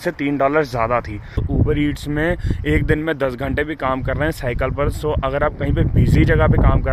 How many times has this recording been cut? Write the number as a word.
one